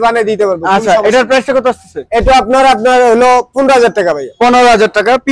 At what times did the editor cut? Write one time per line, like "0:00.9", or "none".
none